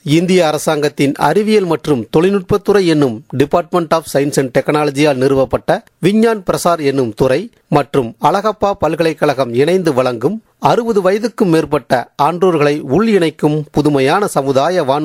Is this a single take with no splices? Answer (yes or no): yes